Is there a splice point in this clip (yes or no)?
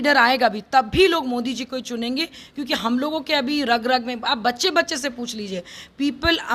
no